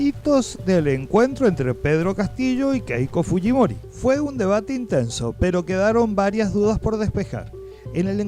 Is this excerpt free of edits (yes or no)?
yes